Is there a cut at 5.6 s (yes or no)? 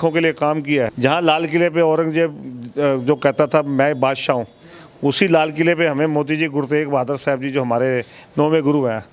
no